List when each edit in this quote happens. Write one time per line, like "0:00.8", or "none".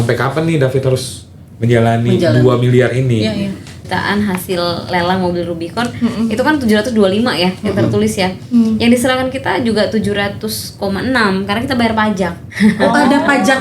0:03.8